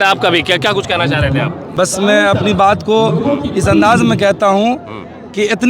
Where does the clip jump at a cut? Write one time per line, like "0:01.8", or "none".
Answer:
0:01.6